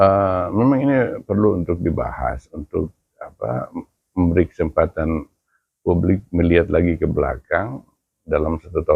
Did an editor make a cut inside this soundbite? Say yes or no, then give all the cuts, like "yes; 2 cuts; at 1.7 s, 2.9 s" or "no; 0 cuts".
no; 0 cuts